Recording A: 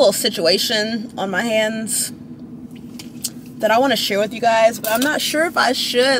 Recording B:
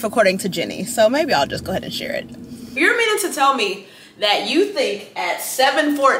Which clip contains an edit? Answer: B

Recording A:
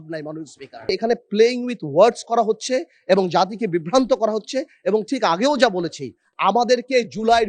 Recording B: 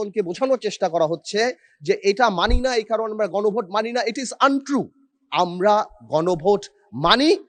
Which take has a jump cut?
A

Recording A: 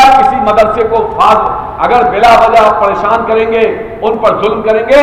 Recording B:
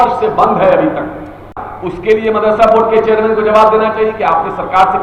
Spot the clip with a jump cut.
B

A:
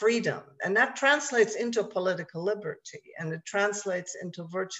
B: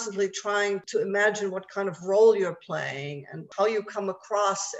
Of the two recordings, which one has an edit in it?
B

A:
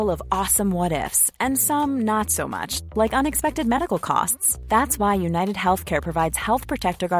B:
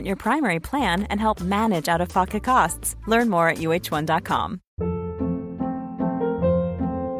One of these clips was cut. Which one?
B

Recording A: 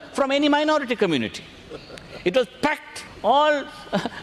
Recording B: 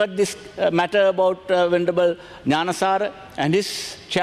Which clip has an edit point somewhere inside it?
A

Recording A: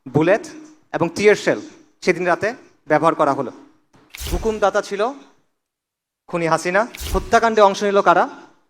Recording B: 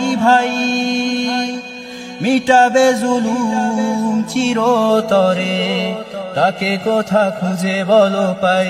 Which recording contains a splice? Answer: A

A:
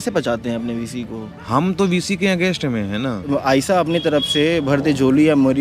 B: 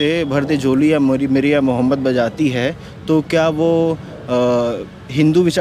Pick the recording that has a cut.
A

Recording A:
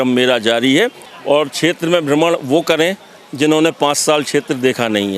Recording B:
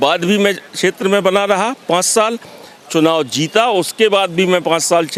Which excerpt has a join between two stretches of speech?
A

